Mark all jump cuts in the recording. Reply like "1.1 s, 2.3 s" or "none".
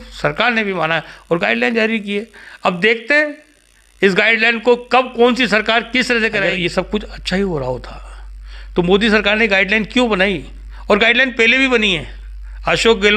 6.5 s